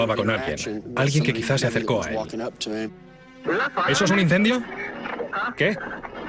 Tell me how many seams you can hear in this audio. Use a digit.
1